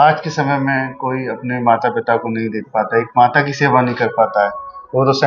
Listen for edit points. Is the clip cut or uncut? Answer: uncut